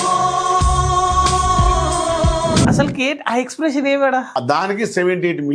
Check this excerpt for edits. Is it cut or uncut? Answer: cut